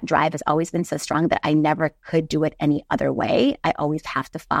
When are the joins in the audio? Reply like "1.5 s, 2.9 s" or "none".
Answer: none